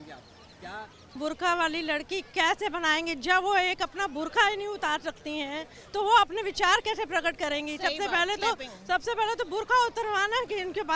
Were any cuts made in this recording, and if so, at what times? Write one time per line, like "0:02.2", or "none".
0:01.1